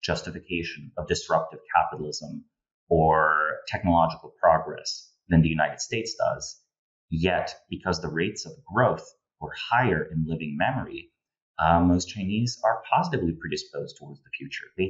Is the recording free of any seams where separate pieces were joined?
yes; 0 cuts

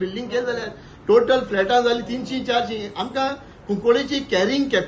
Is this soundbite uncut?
yes; 0 cuts

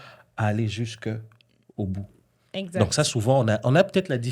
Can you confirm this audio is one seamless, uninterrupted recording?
yes; 0 cuts

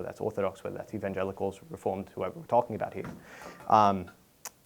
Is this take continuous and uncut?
yes; 0 cuts

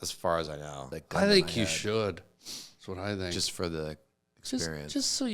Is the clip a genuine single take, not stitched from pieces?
no; 1 cut; at 0.9 s

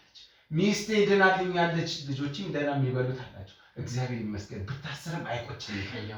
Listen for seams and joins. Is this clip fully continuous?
yes; 0 cuts

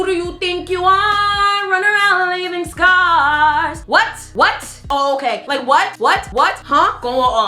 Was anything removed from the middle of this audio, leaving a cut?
yes; 1 cut; at 4.8 s

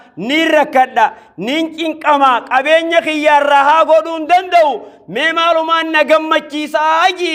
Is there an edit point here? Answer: no; 0 cuts

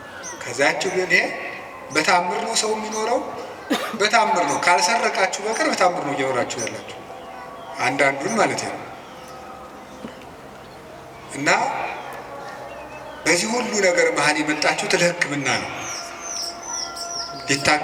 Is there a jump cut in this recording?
no; 0 cuts

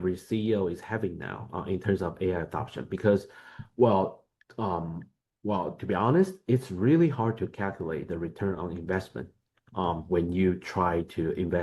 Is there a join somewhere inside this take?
no; 0 cuts

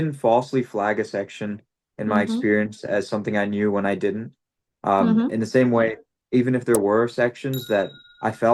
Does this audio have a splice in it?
no; 0 cuts

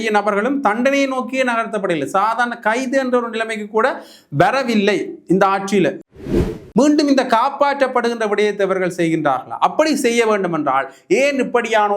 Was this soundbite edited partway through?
yes; 1 cut; at 6.1 s

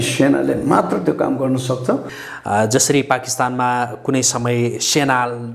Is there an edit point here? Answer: yes; 1 cut; at 2.1 s

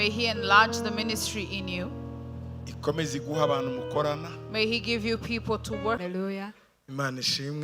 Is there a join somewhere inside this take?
yes; 1 cut; at 6.0 s

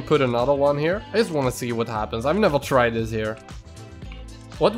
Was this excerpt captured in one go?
yes; 0 cuts

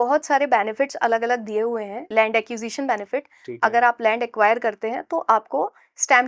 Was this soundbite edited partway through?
yes; 1 cut; at 1.9 s

